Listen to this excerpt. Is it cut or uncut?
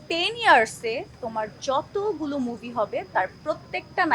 uncut